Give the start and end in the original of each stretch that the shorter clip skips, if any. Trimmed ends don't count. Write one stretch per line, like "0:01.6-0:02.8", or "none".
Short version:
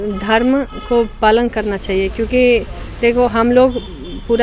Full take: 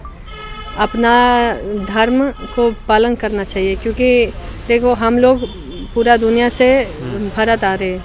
none

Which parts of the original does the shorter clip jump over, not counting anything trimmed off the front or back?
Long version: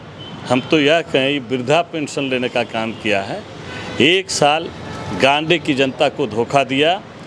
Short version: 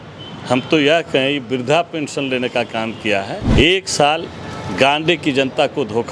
0:03.4-0:03.9

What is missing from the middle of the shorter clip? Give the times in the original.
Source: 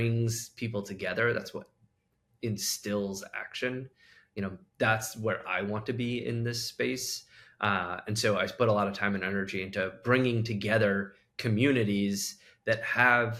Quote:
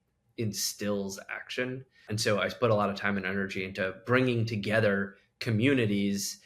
0:04.1-0:08.0

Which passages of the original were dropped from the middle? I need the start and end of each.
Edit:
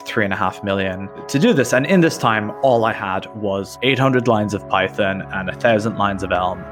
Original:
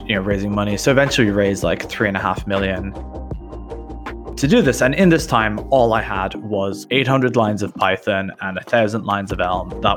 0:03.0-0:04.2

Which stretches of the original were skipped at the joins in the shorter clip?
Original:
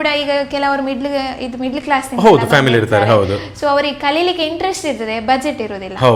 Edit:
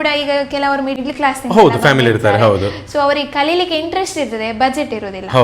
0:01.0-0:01.7

